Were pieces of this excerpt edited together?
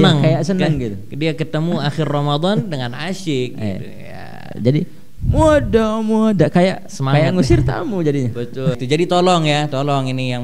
yes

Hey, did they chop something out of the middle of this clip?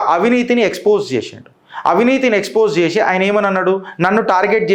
no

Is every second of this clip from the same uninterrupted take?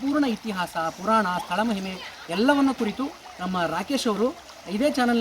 yes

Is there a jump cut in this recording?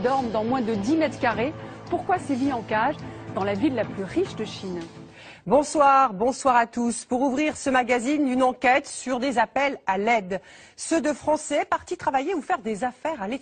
yes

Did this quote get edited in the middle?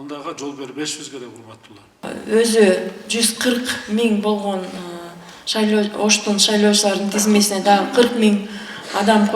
yes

